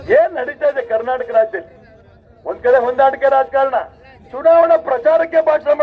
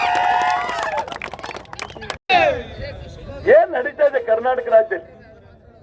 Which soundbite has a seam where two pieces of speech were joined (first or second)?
second